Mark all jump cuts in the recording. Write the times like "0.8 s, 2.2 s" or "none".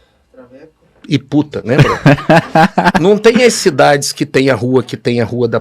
1.6 s, 2.9 s